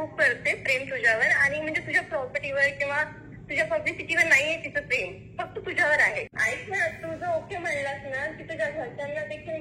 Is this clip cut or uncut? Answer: cut